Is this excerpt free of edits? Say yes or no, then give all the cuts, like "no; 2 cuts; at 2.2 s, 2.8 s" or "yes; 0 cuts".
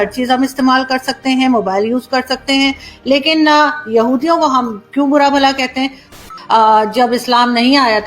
no; 1 cut; at 6.1 s